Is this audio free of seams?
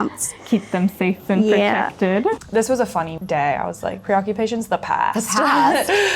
no; 2 cuts; at 2.4 s, 3.2 s

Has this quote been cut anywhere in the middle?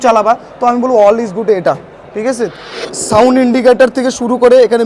yes; 1 cut; at 2.5 s

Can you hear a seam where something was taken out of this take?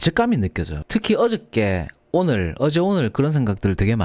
no; 0 cuts

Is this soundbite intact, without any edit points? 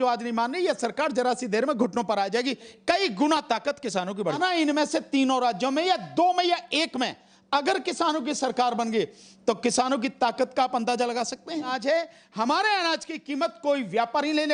no; 2 cuts; at 4.3 s, 11.7 s

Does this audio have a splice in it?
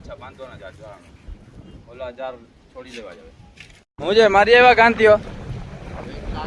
yes; 1 cut; at 3.9 s

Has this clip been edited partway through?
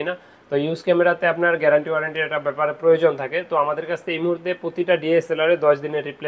no; 0 cuts

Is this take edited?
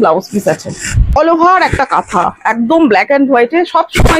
yes; 1 cut; at 1.2 s

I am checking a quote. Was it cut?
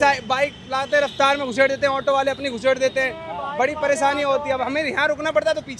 no; 0 cuts

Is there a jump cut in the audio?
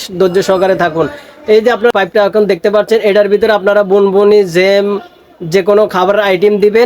yes; 1 cut; at 1.9 s

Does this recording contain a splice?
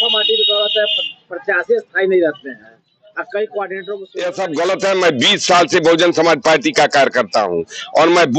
yes; 1 cut; at 4.1 s

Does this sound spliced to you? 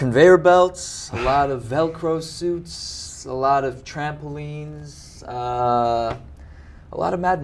no; 0 cuts

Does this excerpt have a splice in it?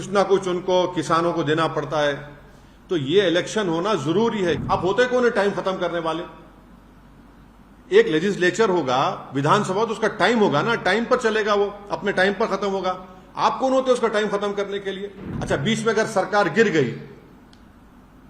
yes; 2 cuts; at 4.6 s, 15.3 s

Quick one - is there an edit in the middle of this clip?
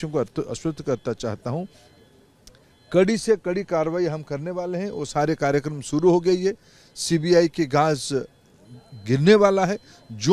no; 0 cuts

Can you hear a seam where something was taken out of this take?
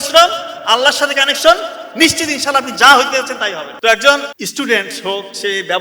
yes; 2 cuts; at 3.7 s, 4.4 s

